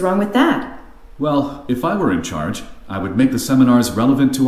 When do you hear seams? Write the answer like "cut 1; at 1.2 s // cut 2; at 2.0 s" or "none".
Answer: cut 1; at 1.0 s // cut 2; at 2.8 s